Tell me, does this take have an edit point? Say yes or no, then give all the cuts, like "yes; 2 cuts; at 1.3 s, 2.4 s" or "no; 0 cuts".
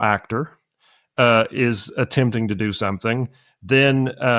no; 0 cuts